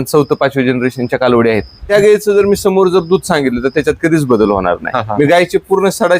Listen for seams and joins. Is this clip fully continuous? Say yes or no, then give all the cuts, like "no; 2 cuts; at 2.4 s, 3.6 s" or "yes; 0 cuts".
no; 2 cuts; at 1.9 s, 4.8 s